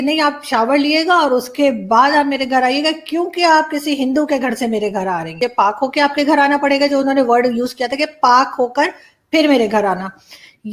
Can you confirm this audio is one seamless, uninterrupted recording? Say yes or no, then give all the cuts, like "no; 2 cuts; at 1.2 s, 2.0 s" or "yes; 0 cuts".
no; 1 cut; at 5.3 s